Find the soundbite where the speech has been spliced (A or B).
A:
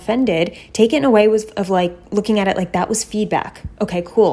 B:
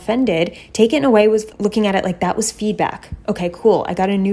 B